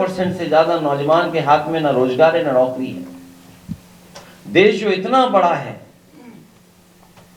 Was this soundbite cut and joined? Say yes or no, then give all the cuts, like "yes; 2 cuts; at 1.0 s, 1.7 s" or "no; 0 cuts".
no; 0 cuts